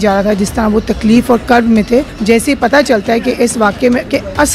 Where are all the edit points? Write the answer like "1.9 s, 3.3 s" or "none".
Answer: 2.1 s

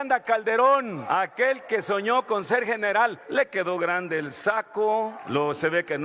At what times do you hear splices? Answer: 1.0 s, 3.2 s, 5.2 s

